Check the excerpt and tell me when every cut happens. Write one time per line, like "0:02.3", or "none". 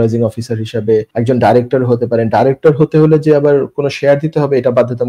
0:01.1